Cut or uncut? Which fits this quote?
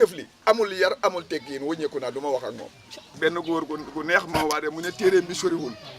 cut